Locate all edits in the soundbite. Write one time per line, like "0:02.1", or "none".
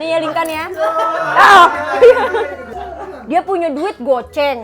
0:02.7

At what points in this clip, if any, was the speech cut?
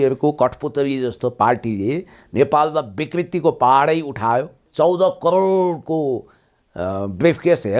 0:04.6

